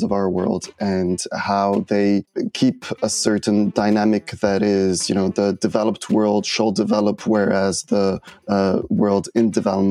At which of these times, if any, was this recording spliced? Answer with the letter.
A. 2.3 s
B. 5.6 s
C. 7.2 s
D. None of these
A